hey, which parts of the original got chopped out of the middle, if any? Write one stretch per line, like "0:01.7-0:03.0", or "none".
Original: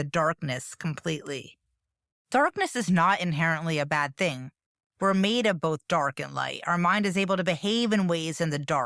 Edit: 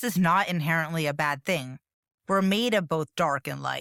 none